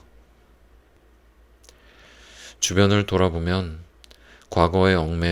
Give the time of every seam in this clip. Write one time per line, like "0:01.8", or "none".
0:01.0